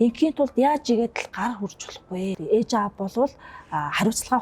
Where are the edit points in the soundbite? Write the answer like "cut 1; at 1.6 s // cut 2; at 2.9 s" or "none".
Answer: cut 1; at 2.4 s